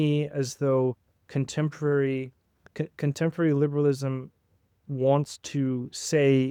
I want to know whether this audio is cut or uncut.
uncut